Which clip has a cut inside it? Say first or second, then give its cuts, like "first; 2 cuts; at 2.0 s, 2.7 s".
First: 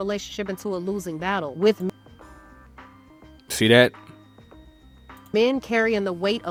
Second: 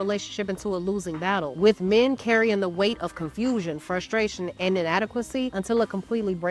second; 1 cut; at 1.9 s